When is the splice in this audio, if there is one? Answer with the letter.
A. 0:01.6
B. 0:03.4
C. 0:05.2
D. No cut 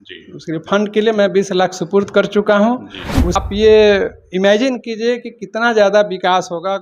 B